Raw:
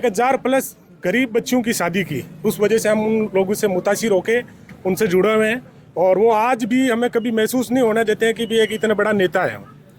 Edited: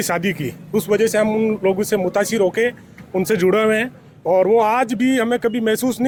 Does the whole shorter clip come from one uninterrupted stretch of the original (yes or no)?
yes